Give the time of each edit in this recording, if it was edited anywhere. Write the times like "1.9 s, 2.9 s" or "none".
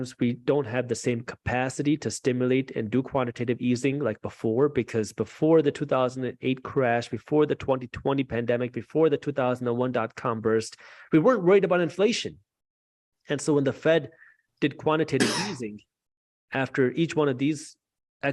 none